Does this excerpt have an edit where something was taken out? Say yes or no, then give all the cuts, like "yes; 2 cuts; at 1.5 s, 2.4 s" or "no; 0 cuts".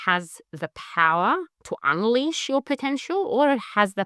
no; 0 cuts